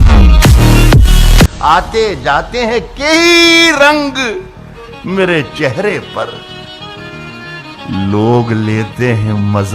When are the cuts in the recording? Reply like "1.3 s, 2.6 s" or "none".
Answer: 1.6 s